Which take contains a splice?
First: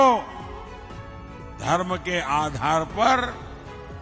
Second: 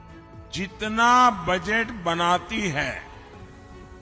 second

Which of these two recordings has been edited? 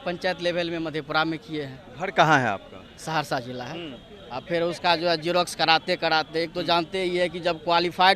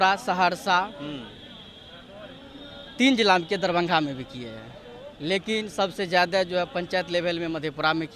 first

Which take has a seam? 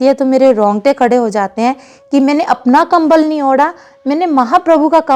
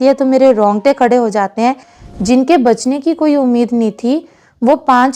second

